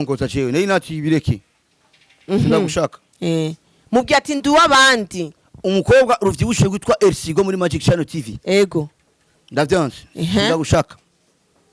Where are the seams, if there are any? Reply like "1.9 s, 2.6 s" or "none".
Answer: none